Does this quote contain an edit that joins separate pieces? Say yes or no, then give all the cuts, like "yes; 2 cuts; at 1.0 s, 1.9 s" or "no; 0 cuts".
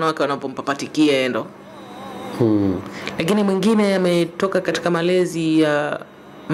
no; 0 cuts